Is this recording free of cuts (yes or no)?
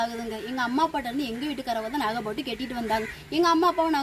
yes